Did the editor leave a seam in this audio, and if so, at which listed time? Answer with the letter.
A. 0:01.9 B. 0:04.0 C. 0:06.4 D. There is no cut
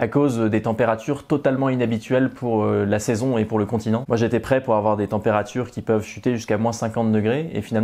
B